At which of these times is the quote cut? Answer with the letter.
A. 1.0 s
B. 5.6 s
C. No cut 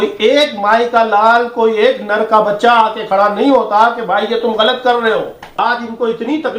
B